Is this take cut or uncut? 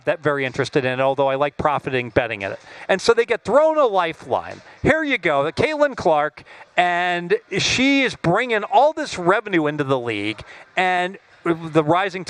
uncut